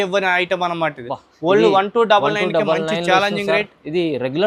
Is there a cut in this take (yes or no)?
no